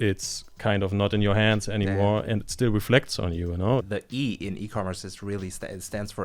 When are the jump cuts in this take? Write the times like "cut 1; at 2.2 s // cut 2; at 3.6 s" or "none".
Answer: cut 1; at 3.9 s